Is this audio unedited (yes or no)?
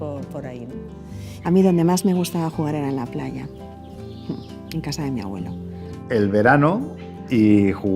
yes